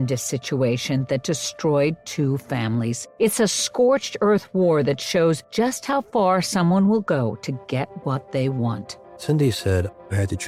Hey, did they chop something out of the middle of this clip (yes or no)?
no